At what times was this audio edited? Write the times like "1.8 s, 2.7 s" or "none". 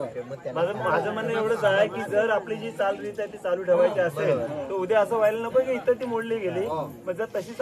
none